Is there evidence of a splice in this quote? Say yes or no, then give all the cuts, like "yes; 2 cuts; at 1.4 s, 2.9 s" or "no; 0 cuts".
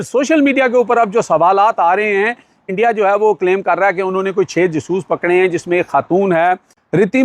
yes; 1 cut; at 2.6 s